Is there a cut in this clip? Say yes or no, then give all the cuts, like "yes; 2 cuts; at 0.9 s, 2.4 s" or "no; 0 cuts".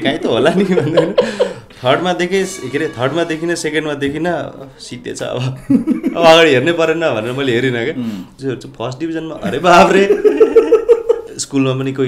yes; 2 cuts; at 8.3 s, 11.2 s